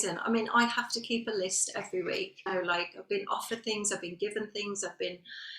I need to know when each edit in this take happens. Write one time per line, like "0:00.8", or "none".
0:02.5